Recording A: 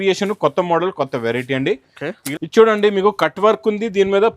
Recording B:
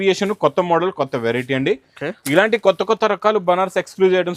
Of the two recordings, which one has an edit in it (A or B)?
A